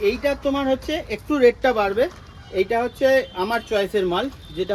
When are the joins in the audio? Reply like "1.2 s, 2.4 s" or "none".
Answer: none

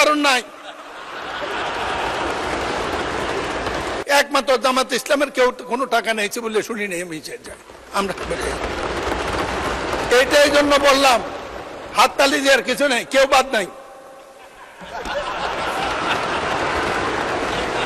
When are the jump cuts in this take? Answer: 4.0 s

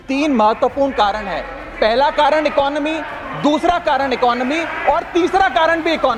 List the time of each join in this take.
none

